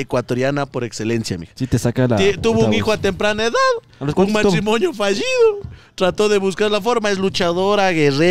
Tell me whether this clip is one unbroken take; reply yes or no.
yes